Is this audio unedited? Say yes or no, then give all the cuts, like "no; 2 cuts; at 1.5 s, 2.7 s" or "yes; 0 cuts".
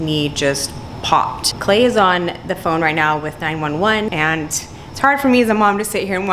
no; 2 cuts; at 1.5 s, 4.1 s